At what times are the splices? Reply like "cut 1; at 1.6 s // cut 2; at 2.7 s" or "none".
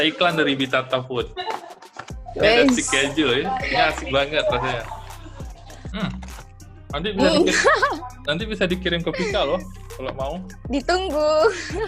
cut 1; at 10.5 s